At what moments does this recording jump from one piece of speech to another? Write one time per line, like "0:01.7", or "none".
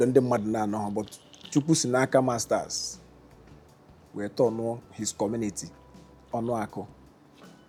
none